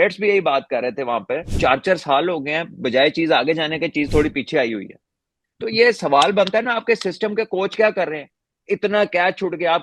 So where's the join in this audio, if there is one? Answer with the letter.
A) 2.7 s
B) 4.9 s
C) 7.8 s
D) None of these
D